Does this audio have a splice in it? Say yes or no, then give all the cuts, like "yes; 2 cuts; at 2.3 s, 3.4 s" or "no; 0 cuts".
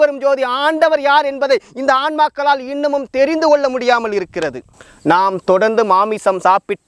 no; 0 cuts